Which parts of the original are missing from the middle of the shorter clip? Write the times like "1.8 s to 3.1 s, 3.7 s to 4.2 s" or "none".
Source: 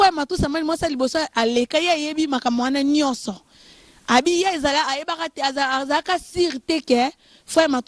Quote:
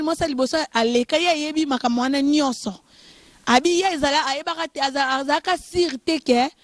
none